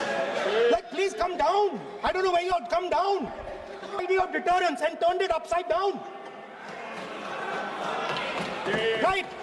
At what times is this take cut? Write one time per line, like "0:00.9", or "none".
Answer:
0:04.0